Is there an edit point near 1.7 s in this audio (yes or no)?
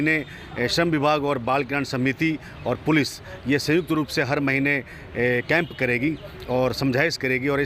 no